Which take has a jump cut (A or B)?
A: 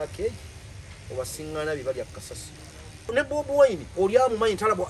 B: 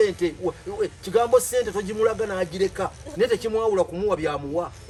A